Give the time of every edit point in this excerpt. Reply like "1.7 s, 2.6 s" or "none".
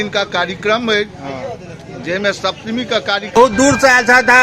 3.4 s

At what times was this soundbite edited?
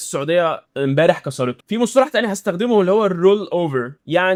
none

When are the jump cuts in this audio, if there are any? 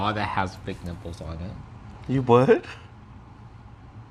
none

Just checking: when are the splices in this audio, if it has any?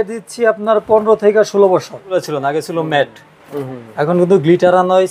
2.2 s

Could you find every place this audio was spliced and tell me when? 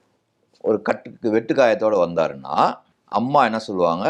2.9 s

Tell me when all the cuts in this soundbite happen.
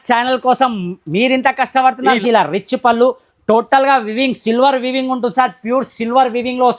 2.2 s

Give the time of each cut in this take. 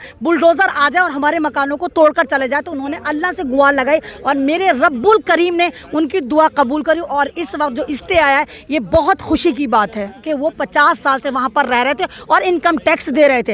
10.2 s

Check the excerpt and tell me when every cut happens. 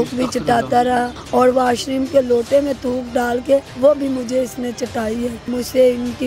1.2 s, 3.7 s, 5.5 s

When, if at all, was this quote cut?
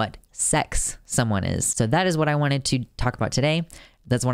1.7 s

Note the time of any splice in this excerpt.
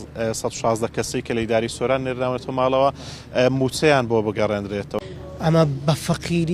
4.9 s

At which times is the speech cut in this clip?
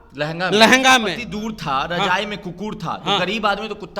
1.2 s

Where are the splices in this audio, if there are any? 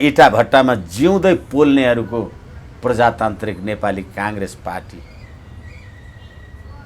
none

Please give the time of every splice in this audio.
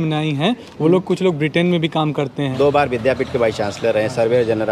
2.5 s

